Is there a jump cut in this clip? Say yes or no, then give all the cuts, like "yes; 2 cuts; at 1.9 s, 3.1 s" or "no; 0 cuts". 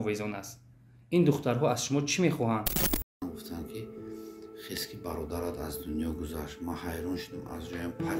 yes; 1 cut; at 3.1 s